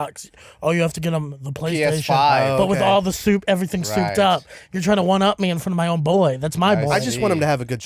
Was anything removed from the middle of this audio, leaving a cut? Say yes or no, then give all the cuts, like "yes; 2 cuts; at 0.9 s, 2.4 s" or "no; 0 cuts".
no; 0 cuts